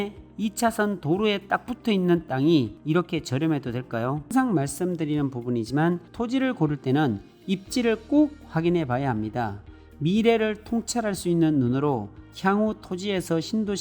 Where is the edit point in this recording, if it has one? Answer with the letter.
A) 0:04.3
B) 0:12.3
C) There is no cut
A